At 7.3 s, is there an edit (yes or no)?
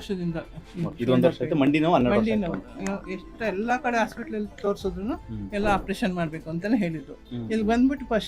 yes